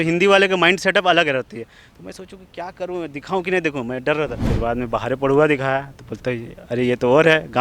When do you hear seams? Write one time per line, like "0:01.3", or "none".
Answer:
0:04.5